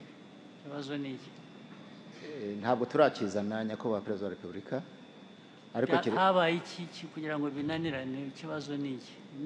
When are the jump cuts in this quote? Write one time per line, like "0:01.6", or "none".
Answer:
none